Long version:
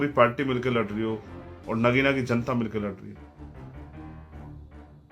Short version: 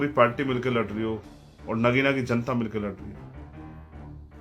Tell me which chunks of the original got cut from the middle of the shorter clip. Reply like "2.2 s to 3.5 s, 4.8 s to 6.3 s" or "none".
3.2 s to 3.6 s